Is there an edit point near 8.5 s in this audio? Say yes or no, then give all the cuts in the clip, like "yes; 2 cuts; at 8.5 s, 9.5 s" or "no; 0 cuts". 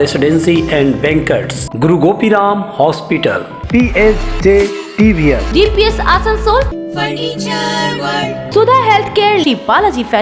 yes; 2 cuts; at 6.7 s, 8.5 s